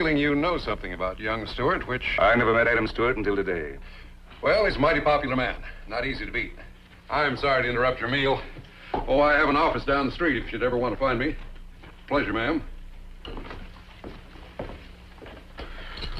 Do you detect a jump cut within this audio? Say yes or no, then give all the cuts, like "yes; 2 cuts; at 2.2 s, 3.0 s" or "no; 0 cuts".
yes; 1 cut; at 14.6 s